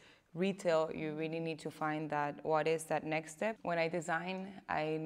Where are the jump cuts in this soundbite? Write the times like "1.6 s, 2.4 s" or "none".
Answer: 3.6 s